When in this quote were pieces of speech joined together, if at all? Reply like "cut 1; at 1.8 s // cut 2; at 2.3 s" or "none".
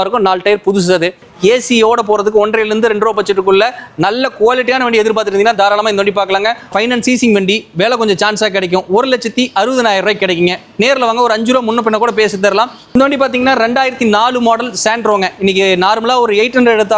cut 1; at 1.2 s // cut 2; at 6.7 s // cut 3; at 12.8 s